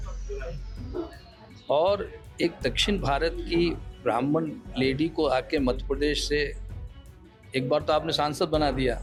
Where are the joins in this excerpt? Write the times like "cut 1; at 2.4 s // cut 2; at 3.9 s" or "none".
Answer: none